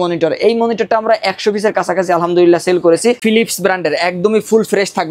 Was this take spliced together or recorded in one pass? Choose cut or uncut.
cut